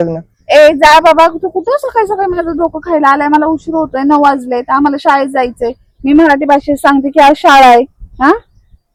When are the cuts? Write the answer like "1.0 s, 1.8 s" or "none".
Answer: none